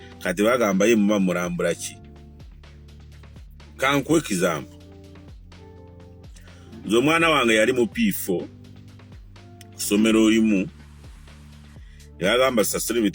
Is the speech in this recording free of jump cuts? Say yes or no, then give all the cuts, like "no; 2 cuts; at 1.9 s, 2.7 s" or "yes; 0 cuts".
no; 4 cuts; at 1.8 s, 3.5 s, 4.8 s, 6.7 s